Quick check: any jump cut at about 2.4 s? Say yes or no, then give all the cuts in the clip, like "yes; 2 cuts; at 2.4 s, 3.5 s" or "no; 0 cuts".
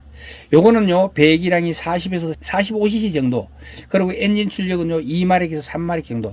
yes; 1 cut; at 2.4 s